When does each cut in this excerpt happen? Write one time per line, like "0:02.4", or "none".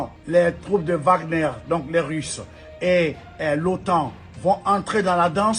none